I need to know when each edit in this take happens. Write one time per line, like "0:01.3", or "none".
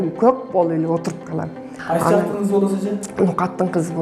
0:01.7